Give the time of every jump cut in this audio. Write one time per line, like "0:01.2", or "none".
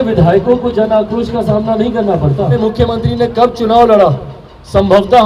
0:02.6

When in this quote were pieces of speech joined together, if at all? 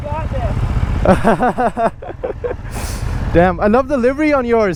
none

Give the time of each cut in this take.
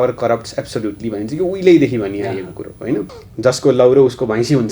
0:03.2

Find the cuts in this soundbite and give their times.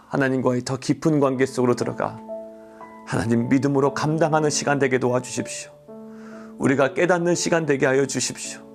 none

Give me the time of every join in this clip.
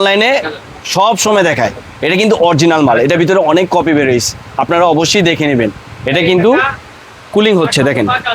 none

